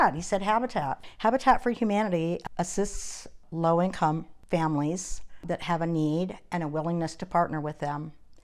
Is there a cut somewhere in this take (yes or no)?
yes